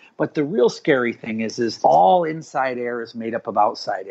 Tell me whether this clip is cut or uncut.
uncut